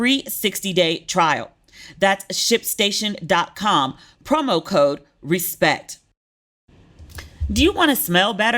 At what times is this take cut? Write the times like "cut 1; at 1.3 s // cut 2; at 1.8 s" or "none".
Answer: cut 1; at 6.5 s